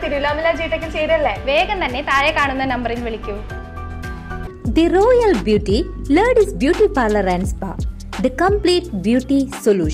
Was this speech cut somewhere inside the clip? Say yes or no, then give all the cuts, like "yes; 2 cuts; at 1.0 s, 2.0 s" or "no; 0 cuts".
yes; 1 cut; at 4.5 s